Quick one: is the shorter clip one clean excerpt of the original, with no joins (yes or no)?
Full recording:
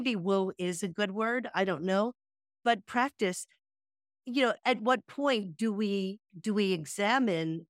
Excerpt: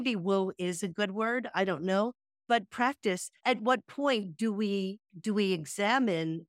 no